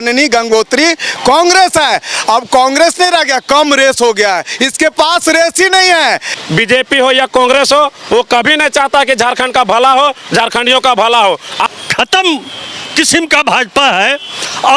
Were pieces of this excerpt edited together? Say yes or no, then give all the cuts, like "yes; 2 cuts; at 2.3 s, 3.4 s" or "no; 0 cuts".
yes; 2 cuts; at 6.3 s, 11.7 s